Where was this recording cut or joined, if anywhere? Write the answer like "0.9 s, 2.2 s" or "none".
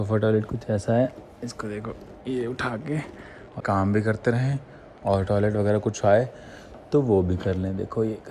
3.6 s